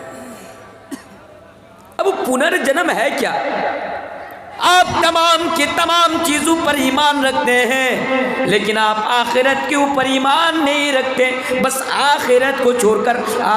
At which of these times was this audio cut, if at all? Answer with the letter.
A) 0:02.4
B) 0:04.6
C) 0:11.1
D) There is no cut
B